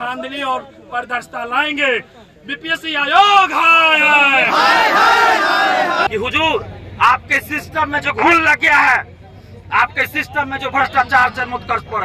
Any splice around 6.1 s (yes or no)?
yes